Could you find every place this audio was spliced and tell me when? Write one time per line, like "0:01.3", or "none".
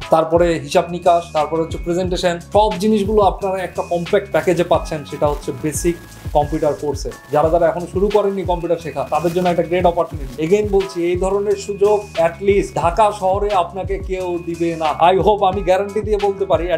0:15.0